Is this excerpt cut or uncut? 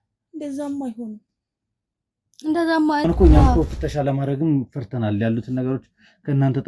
cut